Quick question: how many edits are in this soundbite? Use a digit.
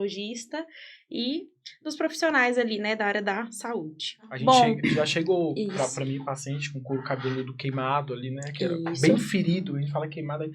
1